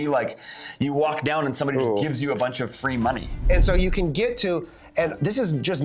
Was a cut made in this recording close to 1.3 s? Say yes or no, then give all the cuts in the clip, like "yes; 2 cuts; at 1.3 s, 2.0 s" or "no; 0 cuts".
no; 1 cut; at 3.4 s